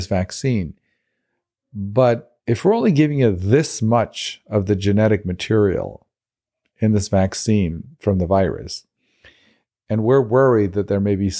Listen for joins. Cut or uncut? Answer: cut